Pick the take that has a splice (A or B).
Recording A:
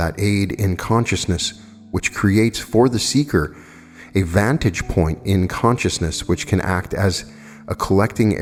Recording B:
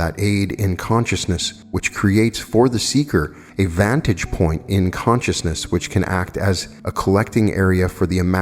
B